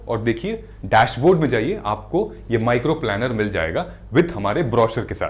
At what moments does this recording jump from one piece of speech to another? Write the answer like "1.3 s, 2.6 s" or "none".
none

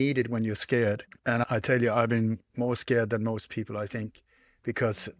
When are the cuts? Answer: 1.1 s

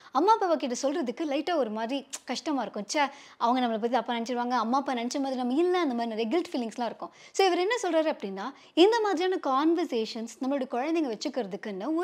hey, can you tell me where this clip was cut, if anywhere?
none

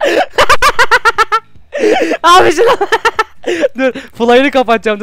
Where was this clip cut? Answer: none

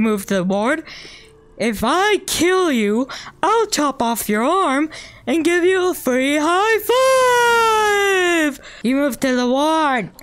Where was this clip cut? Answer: 8.7 s

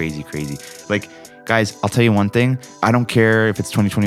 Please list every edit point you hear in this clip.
1.3 s, 2.7 s

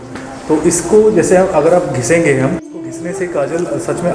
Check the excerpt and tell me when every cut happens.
2.6 s

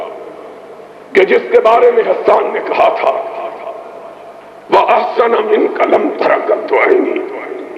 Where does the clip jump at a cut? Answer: none

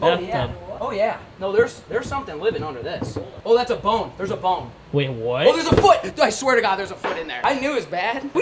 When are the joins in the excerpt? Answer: 7.3 s

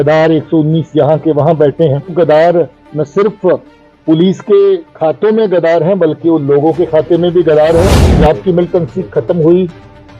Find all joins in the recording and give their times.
2.1 s, 8.0 s

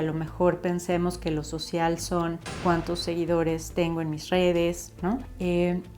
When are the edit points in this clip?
none

